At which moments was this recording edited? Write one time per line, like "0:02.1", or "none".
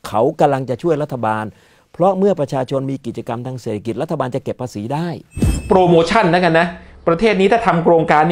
0:05.7